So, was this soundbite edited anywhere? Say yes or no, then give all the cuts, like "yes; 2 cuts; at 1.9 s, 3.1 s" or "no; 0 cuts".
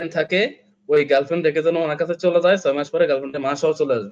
no; 0 cuts